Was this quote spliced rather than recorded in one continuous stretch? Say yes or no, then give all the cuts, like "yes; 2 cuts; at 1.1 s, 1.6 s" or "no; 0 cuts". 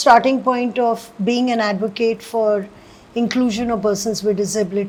no; 0 cuts